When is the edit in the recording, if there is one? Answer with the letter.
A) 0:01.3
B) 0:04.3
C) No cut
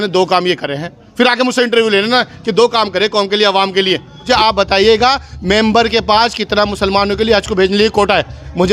B